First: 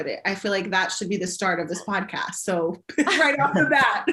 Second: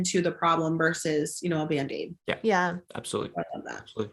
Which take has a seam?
second; 2 cuts; at 2.2 s, 2.9 s

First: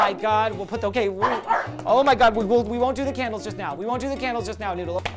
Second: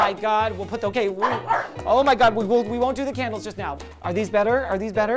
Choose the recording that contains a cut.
second; 1 cut; at 3.7 s

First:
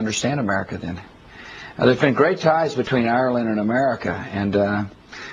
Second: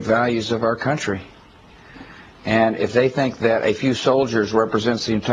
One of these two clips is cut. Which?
first; 1 cut; at 4.3 s

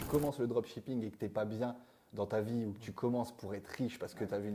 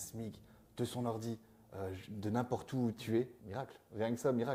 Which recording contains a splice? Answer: second; 1 cut; at 3.4 s

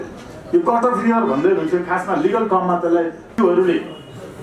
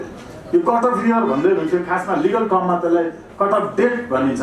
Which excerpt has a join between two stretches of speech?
first; 1 cut; at 3.3 s

